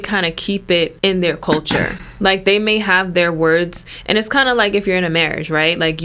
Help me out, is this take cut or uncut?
cut